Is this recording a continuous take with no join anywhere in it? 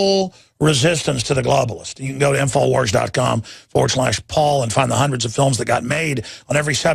no; 1 cut; at 1.4 s

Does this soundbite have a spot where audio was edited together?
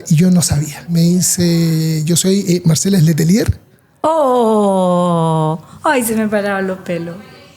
yes; 1 cut; at 0.9 s

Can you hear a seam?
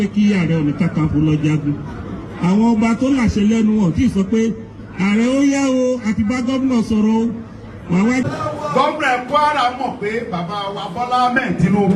yes; 1 cut; at 8.2 s

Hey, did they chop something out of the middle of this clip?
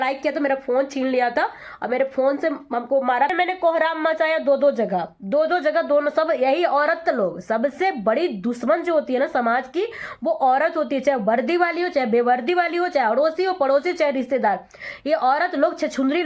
yes; 1 cut; at 3.3 s

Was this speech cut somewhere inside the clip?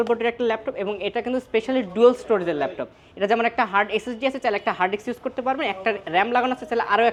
no; 0 cuts

